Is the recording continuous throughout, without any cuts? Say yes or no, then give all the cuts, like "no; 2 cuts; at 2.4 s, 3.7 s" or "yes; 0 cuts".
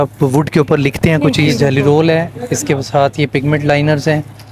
no; 1 cut; at 1.5 s